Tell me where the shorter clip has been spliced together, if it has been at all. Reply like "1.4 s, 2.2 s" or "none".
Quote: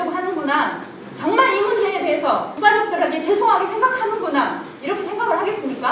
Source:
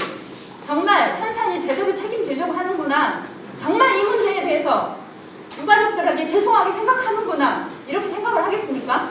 2.5 s